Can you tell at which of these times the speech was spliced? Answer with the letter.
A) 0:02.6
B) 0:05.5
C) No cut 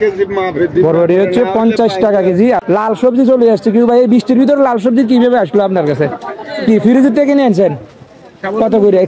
A